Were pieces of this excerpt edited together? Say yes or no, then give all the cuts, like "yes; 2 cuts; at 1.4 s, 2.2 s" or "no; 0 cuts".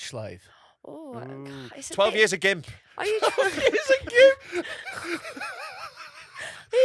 no; 0 cuts